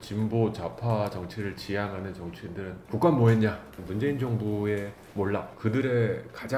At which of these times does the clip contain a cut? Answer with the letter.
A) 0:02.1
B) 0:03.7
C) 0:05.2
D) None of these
B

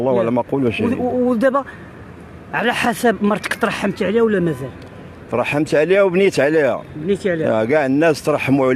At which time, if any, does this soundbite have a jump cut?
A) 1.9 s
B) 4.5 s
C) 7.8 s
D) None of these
D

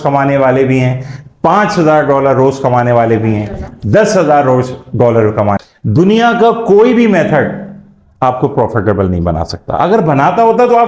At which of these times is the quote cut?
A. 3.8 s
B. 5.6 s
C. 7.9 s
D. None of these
B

